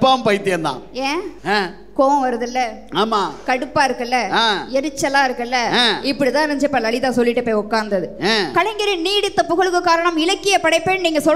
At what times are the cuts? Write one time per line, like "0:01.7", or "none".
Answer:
0:01.3